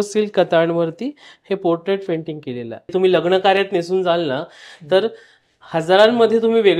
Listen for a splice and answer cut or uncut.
cut